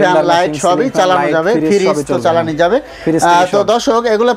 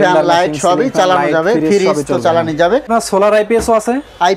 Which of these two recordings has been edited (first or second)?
second